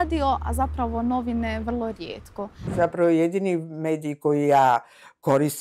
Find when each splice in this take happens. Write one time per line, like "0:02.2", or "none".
0:02.6